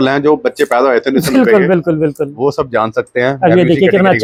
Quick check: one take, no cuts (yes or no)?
yes